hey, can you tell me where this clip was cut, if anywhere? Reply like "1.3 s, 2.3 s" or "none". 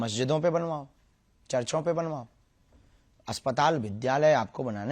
none